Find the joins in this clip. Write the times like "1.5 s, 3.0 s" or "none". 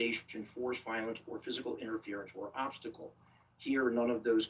none